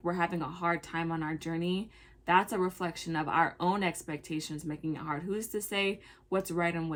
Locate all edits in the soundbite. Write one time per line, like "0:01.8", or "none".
none

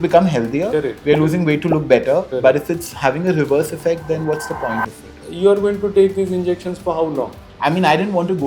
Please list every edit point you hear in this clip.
0:05.2
0:07.4

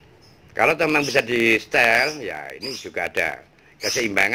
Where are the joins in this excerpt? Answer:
0:02.0

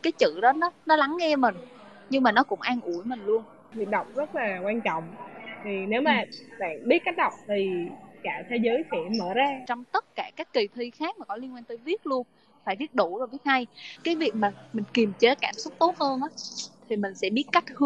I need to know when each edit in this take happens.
0:03.7
0:09.6
0:13.9

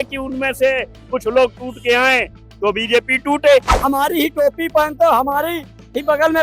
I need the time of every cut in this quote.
0:03.7

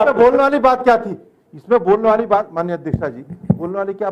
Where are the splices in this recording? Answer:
none

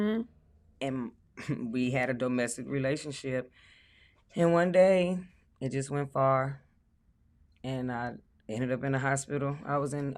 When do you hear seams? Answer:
none

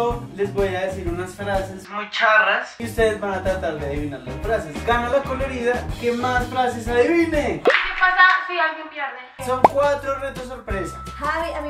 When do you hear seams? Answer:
0:02.8
0:07.6
0:09.3

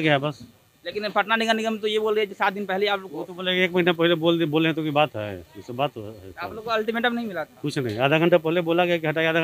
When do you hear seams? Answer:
none

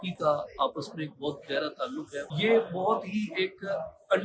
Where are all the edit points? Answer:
0:02.3

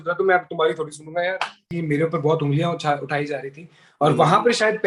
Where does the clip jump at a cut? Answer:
0:01.6

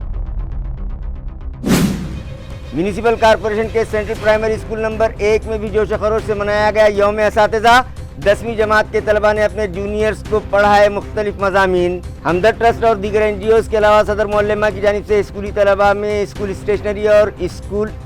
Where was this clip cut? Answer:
none

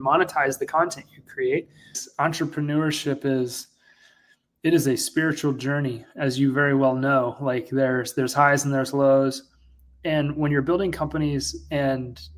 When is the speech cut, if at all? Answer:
0:02.0

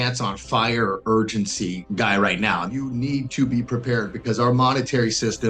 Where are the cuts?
0:01.8
0:02.7

